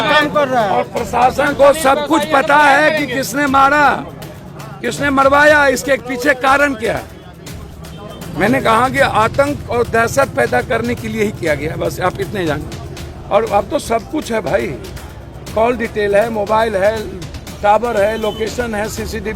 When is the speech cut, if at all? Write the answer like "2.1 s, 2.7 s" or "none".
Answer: 8.3 s